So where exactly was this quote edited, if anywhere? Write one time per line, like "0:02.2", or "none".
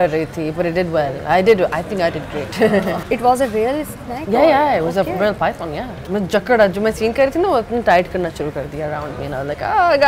0:03.0
0:05.9

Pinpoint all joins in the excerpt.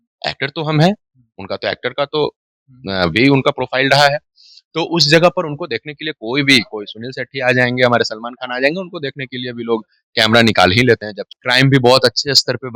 0:11.3

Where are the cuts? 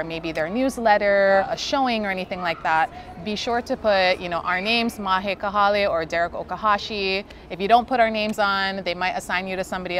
0:01.5

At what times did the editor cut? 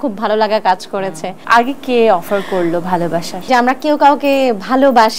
0:01.4
0:03.5

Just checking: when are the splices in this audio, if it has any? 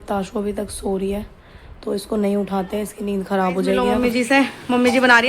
0:03.8

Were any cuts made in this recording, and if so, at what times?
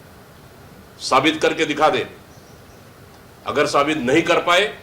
none

